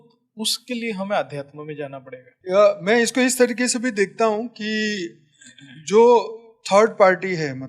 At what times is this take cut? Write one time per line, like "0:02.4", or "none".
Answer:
0:02.3